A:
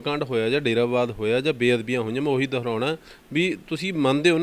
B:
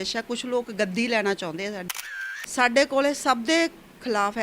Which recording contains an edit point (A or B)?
B